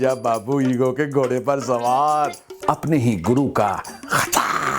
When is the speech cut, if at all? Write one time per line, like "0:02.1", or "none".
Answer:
0:02.5